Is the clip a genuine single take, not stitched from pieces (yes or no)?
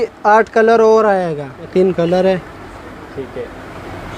no